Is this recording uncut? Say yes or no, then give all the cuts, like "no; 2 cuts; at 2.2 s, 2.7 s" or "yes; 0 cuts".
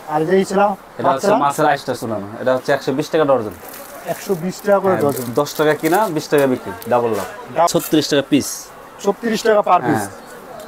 no; 1 cut; at 7.7 s